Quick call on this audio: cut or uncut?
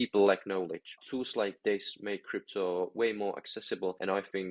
cut